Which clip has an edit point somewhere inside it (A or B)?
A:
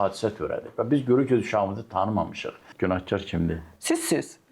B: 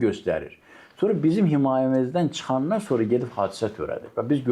A